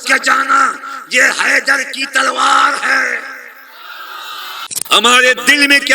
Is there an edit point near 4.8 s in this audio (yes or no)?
yes